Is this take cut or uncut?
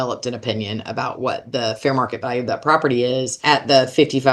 cut